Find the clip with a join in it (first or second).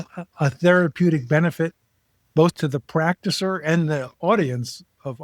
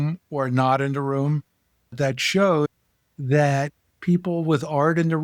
second